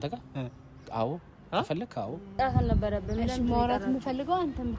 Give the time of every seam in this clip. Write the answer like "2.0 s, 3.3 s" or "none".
2.4 s